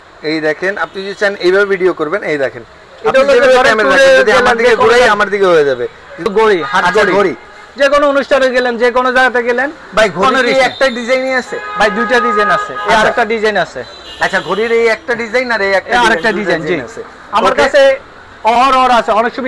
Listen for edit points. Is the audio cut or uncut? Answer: cut